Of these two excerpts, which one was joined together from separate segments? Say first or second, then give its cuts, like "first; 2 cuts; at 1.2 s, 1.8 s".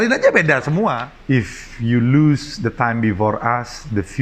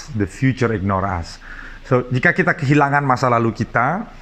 first; 1 cut; at 1.1 s